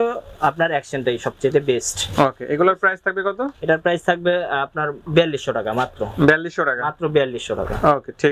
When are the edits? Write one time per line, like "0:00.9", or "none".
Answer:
none